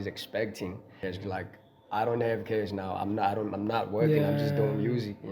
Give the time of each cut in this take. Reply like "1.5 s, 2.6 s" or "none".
1.0 s